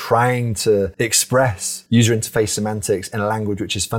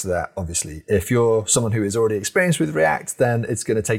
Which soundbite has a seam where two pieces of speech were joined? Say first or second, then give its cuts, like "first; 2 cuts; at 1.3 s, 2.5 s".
first; 1 cut; at 1.2 s